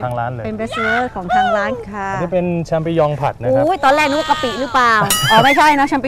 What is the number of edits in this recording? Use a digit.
1